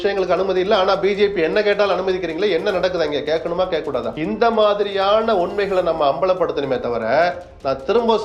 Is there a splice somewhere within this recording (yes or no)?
yes